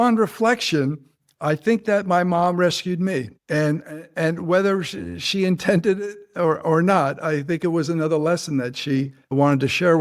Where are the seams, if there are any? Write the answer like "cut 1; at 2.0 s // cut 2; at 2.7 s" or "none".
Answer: none